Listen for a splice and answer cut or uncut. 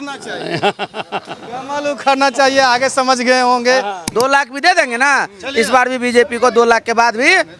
cut